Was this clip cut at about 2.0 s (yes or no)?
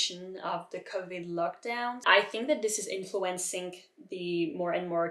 yes